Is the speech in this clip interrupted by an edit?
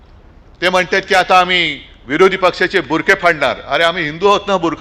no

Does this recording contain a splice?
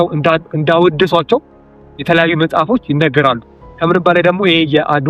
no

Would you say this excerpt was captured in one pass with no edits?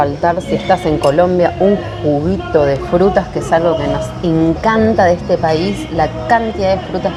yes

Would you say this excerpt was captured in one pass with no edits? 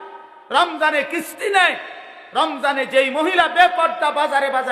yes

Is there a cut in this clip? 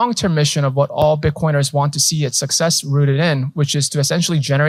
no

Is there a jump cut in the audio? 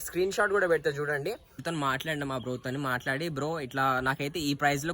yes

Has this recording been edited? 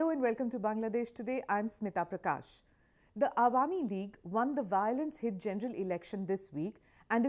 no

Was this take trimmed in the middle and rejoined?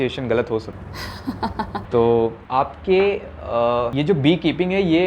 no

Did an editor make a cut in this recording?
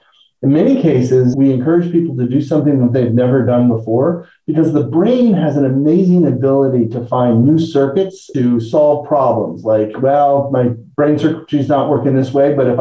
no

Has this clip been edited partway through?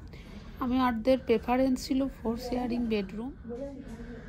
yes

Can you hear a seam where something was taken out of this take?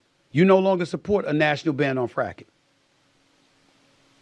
no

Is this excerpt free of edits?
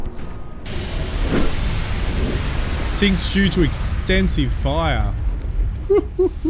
yes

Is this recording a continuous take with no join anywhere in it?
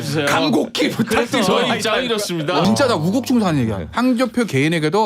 no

